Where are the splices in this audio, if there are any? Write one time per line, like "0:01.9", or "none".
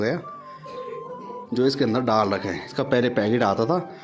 0:02.7